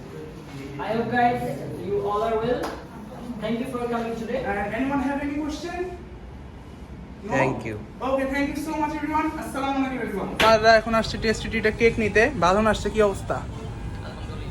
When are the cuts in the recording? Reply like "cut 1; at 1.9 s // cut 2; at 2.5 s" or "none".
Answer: cut 1; at 4.4 s // cut 2; at 10.4 s